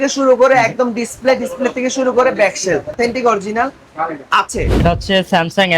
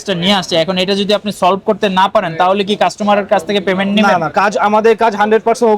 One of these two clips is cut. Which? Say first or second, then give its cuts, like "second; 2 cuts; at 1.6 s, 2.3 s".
first; 2 cuts; at 3.0 s, 4.8 s